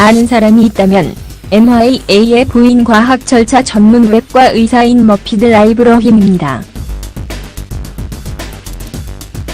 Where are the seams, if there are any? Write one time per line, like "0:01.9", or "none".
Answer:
0:04.7